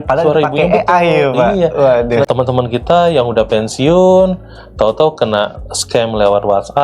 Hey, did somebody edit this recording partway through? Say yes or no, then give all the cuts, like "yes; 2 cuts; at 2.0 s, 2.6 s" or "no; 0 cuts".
yes; 1 cut; at 2.3 s